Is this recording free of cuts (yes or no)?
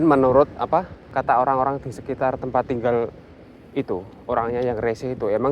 no